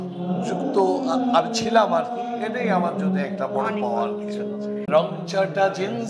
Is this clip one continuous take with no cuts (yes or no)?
no